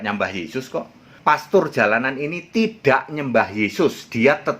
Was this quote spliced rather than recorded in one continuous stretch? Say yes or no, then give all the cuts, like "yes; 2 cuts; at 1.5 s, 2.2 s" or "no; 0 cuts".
yes; 1 cut; at 1.1 s